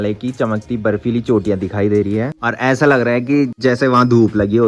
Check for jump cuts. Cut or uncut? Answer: uncut